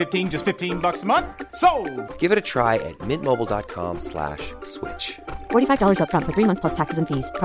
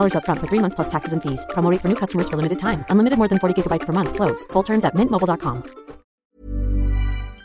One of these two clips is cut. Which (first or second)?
second